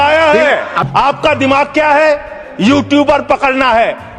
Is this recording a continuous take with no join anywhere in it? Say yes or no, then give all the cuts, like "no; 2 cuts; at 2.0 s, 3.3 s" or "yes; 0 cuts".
no; 1 cut; at 1.0 s